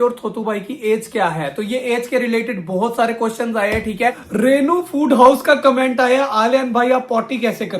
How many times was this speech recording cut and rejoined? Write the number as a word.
one